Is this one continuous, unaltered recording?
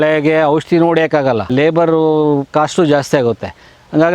no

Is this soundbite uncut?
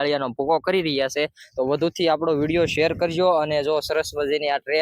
yes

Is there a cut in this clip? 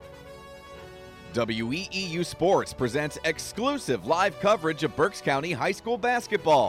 yes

